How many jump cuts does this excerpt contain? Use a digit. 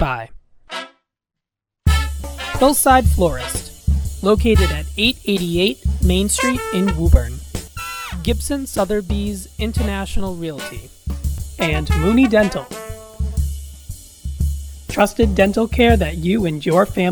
0